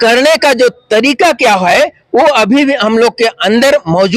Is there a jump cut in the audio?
no; 0 cuts

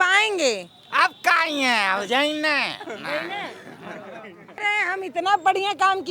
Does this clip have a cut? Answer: yes; 1 cut; at 4.6 s

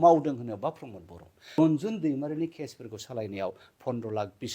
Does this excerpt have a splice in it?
yes; 1 cut; at 1.6 s

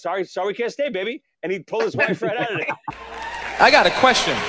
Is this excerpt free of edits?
yes; 0 cuts

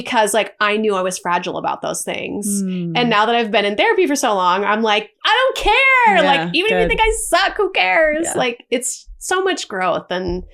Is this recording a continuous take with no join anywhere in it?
yes; 0 cuts

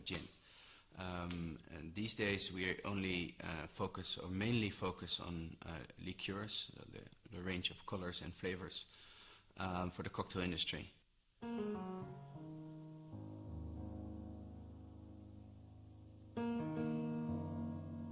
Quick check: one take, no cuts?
no; 1 cut; at 5.4 s

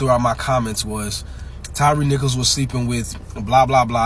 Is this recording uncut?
yes; 0 cuts

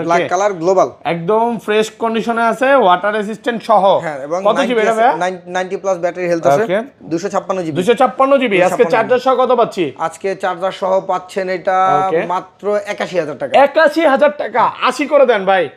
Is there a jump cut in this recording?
no; 0 cuts

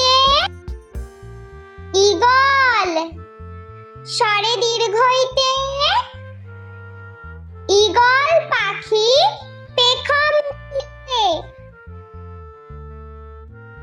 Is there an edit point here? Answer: no; 0 cuts

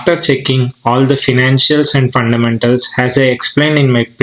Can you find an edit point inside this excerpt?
no; 0 cuts

